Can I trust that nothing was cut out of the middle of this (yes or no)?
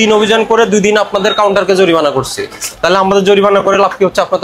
yes